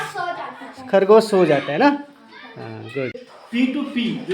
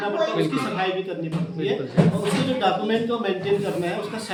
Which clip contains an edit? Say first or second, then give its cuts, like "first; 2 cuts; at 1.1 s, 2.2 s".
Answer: first; 1 cut; at 3.3 s